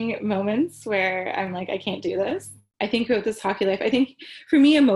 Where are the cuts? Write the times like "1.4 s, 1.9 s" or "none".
2.6 s